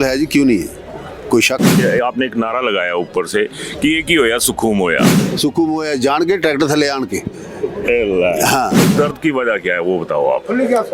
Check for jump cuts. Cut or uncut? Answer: cut